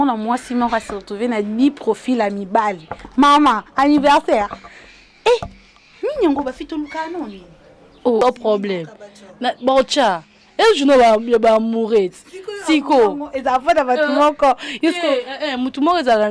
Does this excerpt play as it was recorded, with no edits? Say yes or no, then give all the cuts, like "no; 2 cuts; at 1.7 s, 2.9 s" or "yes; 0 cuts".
no; 1 cut; at 8.2 s